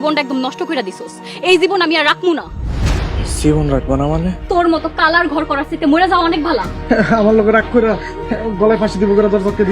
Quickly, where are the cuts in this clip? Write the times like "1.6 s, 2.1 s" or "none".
4.4 s, 6.7 s